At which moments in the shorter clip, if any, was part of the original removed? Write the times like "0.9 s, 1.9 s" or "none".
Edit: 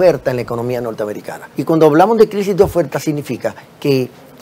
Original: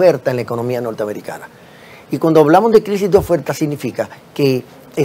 1.4 s